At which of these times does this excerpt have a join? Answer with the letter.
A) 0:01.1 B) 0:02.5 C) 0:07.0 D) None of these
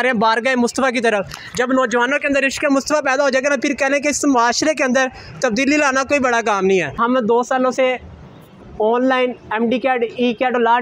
C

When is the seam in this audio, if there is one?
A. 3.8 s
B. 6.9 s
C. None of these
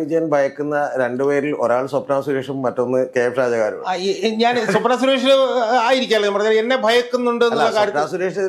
C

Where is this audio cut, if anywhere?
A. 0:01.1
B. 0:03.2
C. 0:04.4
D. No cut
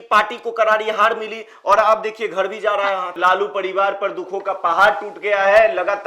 B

